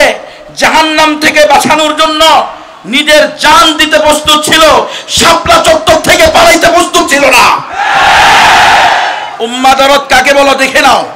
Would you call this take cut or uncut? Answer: uncut